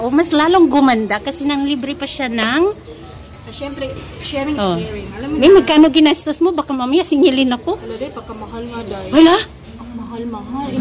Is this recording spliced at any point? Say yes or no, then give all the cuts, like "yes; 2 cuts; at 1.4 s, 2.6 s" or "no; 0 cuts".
no; 0 cuts